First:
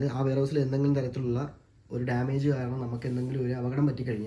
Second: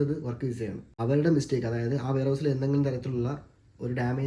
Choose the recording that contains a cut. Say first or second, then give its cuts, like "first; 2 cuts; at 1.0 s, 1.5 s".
second; 1 cut; at 0.9 s